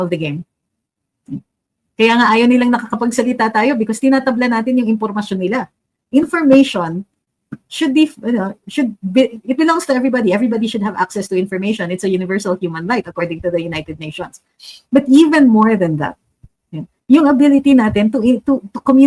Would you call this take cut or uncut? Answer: uncut